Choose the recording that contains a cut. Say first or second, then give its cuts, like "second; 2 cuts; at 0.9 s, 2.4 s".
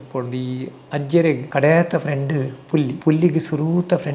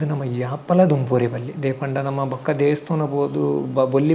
first; 2 cuts; at 1.4 s, 3.0 s